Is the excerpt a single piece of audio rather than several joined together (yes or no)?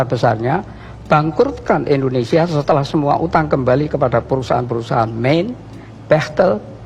yes